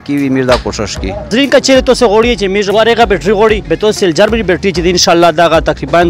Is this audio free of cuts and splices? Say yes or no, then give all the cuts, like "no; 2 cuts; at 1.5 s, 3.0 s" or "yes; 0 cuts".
no; 3 cuts; at 1.3 s, 2.7 s, 3.7 s